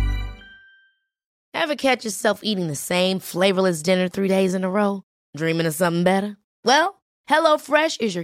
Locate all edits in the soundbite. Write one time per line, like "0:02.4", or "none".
0:01.4